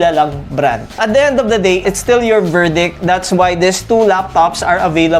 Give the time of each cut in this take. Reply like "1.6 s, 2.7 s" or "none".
0.9 s, 1.8 s